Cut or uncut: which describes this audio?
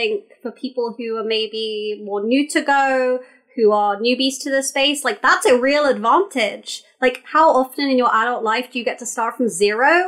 uncut